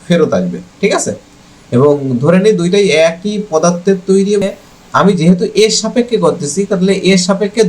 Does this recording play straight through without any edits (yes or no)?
no